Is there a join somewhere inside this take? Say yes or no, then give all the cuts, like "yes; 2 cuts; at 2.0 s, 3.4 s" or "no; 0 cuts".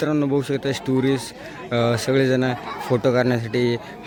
no; 0 cuts